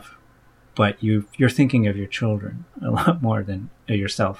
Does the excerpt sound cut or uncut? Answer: uncut